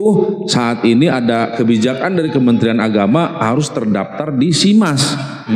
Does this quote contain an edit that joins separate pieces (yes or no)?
no